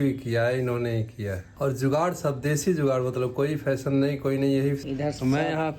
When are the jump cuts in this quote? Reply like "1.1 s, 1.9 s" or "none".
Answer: 1.5 s, 4.8 s